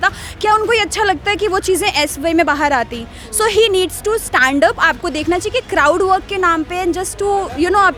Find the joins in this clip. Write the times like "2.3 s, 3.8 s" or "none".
none